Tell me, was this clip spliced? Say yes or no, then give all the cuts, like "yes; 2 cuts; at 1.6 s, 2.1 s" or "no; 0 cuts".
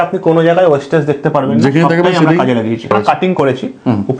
yes; 1 cut; at 2.9 s